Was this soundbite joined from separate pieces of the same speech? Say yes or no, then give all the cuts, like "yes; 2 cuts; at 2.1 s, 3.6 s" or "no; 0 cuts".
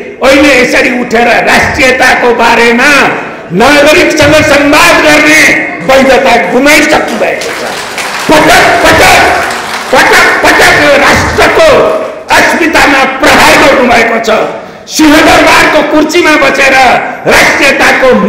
no; 0 cuts